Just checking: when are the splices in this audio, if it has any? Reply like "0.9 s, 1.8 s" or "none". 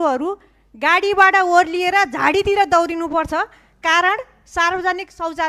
none